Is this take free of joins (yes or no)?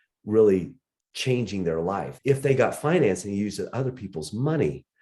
no